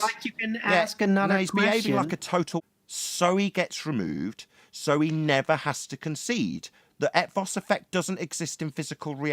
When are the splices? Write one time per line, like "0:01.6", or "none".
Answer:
0:02.6